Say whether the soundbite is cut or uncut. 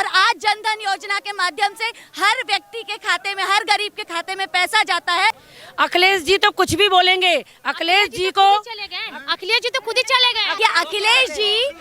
cut